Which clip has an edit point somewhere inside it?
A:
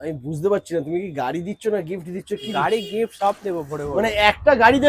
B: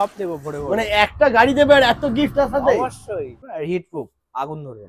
B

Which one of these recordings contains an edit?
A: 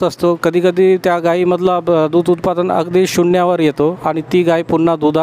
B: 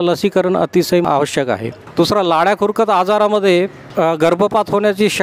B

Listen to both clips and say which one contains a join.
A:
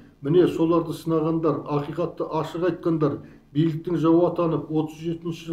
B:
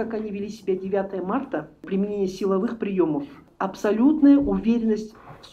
B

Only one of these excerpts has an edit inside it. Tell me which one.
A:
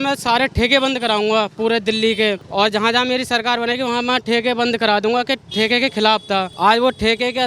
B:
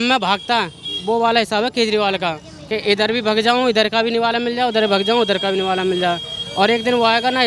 A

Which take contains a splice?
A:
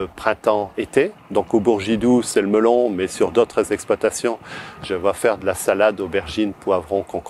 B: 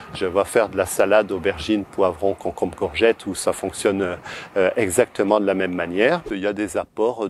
B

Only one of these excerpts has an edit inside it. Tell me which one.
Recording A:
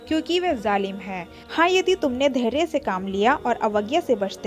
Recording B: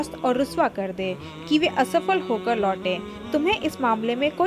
A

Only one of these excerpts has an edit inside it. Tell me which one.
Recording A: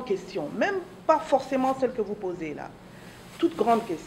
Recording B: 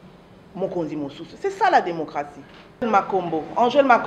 B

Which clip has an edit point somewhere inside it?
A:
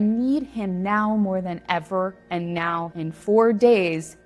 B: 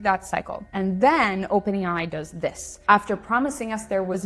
A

